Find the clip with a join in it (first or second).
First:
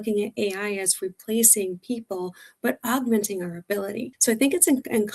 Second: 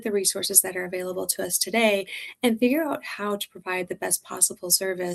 first